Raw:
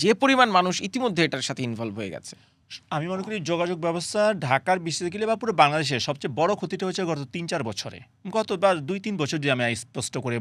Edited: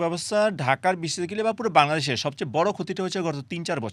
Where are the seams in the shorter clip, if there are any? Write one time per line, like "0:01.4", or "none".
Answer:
none